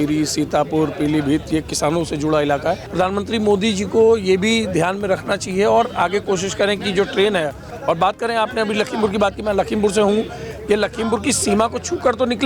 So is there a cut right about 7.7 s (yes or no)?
yes